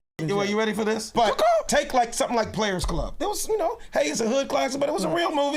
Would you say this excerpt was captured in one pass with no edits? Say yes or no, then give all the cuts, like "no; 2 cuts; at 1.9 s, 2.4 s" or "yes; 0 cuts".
no; 1 cut; at 1.1 s